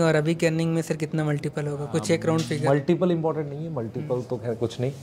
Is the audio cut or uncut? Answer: uncut